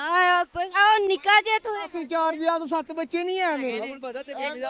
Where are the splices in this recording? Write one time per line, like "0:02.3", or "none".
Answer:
none